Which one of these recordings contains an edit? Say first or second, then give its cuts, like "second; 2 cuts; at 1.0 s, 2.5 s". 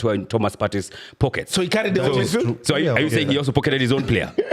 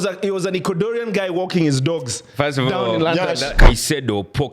second; 1 cut; at 3.5 s